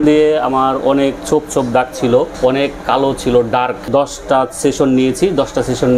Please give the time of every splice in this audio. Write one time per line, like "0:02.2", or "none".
0:02.3
0:03.9